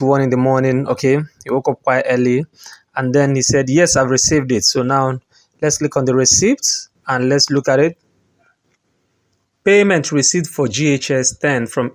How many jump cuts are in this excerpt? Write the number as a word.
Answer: zero